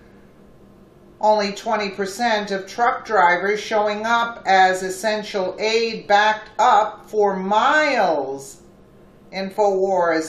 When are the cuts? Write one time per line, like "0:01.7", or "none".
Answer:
0:08.4